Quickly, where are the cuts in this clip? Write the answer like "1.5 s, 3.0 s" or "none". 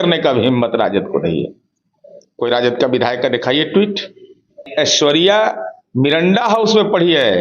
4.6 s